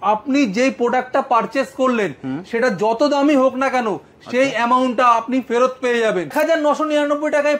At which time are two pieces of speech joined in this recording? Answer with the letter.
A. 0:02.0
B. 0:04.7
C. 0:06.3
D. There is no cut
C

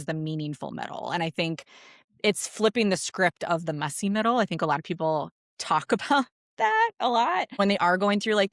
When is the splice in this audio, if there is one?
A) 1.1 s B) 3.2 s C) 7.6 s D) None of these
C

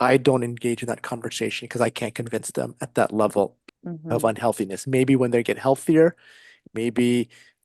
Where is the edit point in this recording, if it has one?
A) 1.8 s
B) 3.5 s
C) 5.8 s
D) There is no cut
D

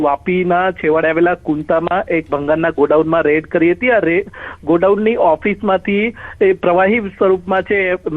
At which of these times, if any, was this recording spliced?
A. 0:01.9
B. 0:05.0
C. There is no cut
B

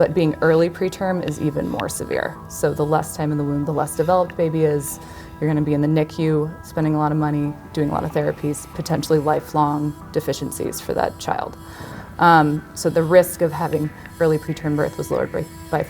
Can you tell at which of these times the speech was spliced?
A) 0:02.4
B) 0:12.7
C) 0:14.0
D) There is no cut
B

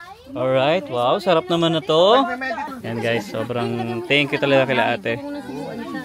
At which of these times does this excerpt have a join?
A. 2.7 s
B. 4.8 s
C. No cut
A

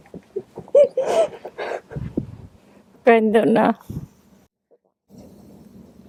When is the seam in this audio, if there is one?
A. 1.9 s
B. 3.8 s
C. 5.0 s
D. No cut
D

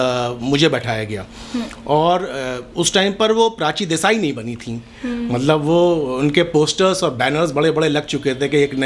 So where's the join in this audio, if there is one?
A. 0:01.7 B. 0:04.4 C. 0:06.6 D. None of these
D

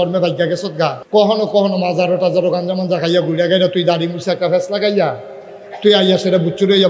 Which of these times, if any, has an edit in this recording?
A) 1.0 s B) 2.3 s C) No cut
A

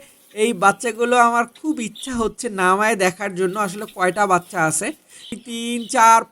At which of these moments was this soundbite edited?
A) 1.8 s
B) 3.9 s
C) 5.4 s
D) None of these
C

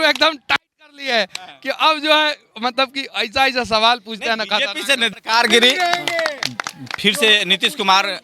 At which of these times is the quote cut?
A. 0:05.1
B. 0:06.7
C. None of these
A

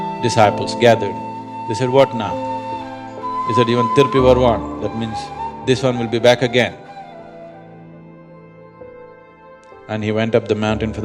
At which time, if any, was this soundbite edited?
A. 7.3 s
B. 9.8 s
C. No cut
A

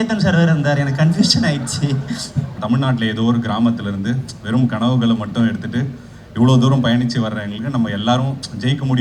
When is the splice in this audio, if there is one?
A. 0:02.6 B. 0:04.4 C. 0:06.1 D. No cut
A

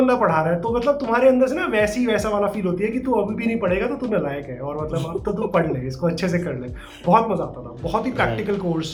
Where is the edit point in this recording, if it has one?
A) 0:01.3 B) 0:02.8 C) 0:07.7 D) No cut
D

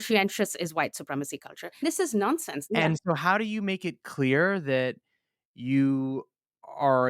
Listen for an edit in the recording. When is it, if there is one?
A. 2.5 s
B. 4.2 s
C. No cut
A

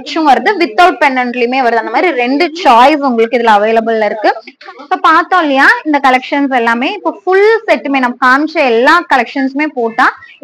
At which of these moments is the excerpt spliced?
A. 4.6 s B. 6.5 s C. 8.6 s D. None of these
A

